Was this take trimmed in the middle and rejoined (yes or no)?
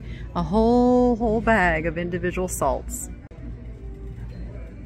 no